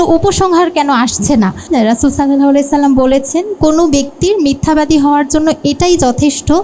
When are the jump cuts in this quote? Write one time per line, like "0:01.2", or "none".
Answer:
0:01.7

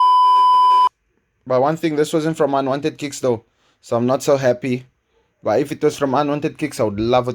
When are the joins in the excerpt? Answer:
0:01.0
0:04.9

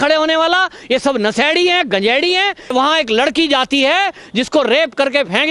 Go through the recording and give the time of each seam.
0:02.7

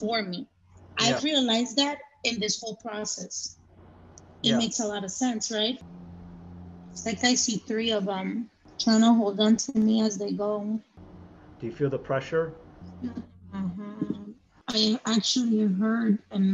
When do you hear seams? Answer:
0:05.8
0:11.0

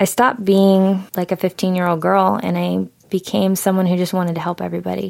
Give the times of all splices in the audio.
0:01.1

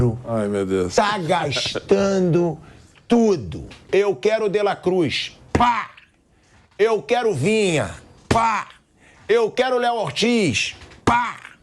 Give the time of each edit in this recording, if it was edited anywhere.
0:03.9

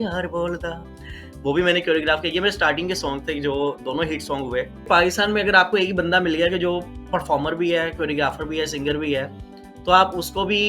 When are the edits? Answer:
0:04.9

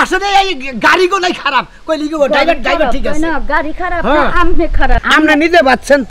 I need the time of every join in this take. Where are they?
0:05.0

